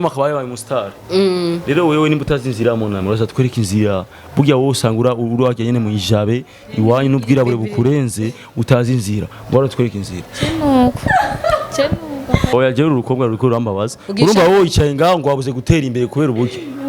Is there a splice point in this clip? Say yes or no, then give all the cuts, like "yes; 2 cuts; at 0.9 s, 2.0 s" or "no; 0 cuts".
yes; 1 cut; at 12.5 s